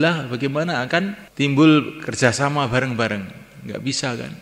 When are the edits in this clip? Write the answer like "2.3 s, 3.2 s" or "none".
1.2 s